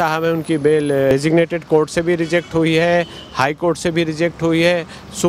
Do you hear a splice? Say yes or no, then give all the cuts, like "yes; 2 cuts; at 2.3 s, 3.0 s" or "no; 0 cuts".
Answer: yes; 1 cut; at 1.1 s